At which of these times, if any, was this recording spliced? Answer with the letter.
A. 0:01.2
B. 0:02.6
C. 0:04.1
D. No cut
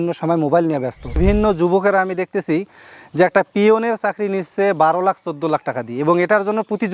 A